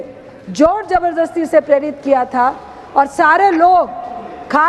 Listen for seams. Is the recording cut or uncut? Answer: uncut